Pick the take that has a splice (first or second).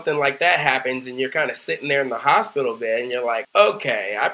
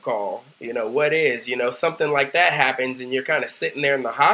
first